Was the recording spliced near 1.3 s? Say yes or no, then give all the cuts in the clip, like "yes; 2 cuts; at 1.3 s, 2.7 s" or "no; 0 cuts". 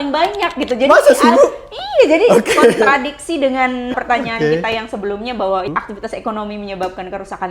no; 2 cuts; at 4.0 s, 5.7 s